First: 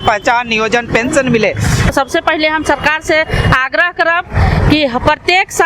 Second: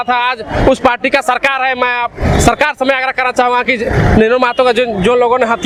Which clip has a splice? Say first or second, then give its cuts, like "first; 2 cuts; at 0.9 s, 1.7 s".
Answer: first; 1 cut; at 1.9 s